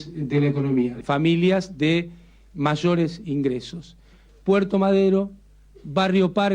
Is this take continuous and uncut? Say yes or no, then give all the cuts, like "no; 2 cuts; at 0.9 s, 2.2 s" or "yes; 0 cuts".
no; 1 cut; at 1.0 s